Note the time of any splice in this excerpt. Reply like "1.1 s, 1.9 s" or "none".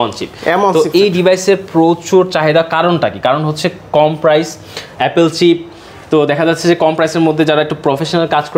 none